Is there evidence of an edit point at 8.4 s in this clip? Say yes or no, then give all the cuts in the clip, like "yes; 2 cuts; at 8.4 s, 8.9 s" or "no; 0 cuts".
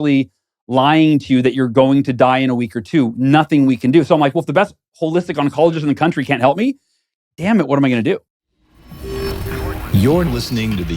yes; 1 cut; at 8.4 s